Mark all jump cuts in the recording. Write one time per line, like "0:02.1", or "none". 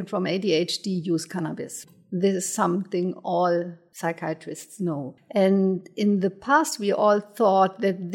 0:01.8
0:03.8
0:05.1